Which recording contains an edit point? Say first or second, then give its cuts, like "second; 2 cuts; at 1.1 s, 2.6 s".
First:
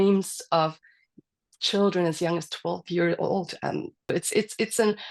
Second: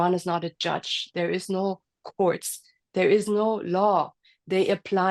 first; 1 cut; at 4.0 s